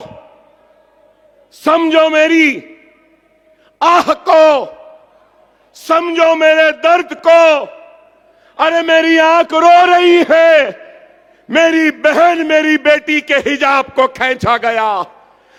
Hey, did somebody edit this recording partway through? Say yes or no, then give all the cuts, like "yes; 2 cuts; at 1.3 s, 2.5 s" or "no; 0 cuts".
no; 0 cuts